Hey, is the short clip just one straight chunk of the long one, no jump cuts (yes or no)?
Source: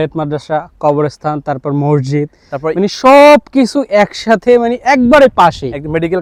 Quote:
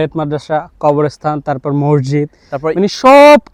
yes